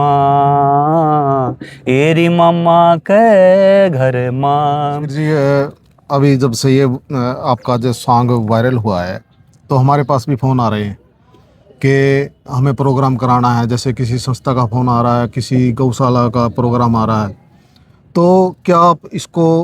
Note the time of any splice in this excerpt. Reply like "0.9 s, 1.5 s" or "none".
5.1 s